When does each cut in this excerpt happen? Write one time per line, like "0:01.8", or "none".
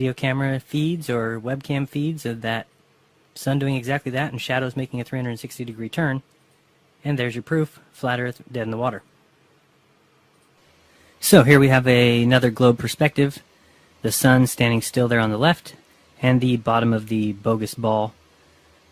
0:01.6